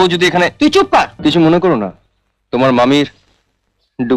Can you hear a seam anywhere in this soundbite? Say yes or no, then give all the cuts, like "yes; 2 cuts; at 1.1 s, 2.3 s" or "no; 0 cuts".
yes; 1 cut; at 1.1 s